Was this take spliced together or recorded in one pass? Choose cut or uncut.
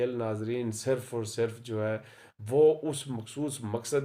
uncut